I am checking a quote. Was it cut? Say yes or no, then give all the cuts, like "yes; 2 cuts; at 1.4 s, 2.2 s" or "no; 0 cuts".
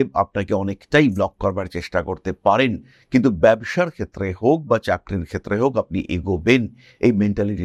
no; 0 cuts